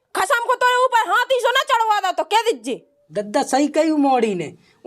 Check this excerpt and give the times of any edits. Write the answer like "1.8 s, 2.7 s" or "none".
2.9 s